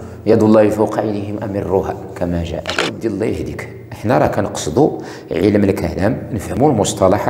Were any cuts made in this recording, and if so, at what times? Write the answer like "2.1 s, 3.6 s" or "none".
2.7 s